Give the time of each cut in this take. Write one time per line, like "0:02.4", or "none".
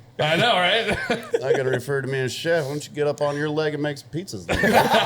0:01.2